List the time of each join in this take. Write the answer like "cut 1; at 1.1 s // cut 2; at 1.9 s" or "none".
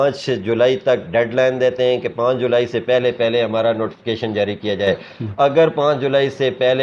none